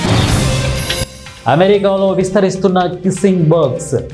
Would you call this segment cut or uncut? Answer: cut